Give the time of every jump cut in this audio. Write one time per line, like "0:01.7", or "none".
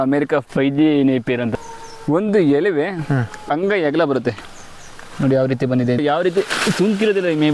0:01.5
0:04.5
0:06.0